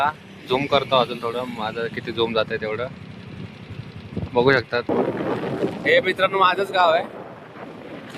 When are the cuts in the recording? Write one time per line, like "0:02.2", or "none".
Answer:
0:04.9